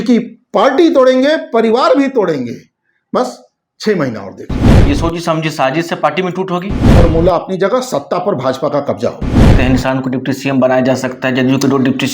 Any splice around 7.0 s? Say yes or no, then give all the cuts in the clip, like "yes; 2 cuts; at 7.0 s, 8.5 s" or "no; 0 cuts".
yes; 3 cuts; at 4.7 s, 7.0 s, 9.5 s